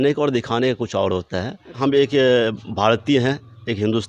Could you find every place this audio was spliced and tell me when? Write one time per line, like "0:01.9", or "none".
0:01.8